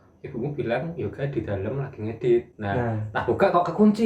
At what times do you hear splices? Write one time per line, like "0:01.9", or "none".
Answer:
0:02.6